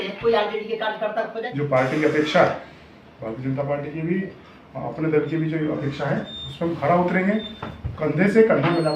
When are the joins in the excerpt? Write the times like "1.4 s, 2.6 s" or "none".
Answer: 1.4 s